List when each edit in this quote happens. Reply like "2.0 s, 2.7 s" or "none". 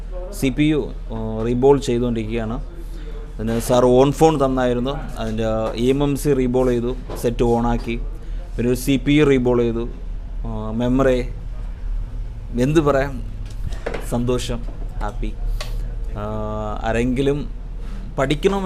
none

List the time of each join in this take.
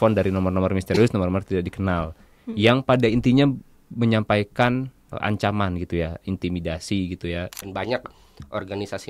5.1 s, 7.6 s

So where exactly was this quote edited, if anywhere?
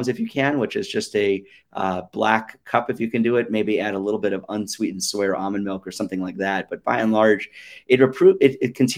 none

